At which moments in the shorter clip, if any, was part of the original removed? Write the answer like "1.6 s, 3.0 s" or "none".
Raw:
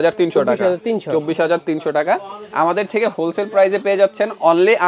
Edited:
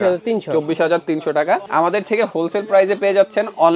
1.7 s